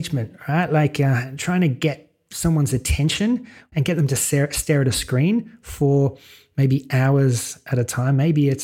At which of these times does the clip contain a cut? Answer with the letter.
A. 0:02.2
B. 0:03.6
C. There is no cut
B